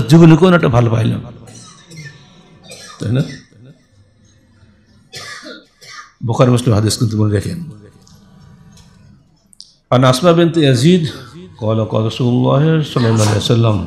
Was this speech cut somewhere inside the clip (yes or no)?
no